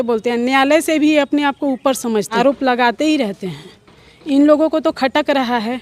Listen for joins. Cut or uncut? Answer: cut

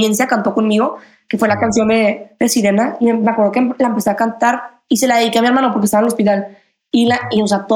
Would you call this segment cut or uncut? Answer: cut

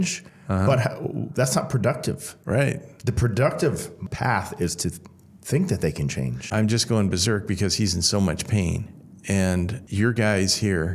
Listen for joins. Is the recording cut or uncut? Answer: cut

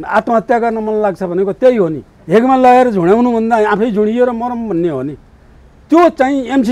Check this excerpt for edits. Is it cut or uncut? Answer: uncut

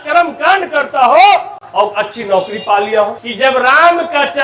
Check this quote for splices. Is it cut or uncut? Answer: cut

